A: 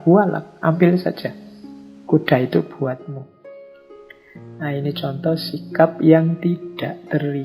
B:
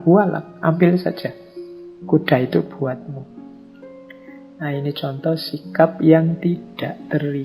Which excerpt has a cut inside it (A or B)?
B